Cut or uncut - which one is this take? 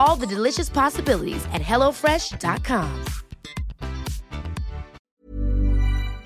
cut